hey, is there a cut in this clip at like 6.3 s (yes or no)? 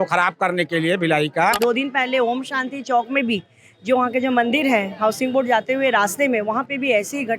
no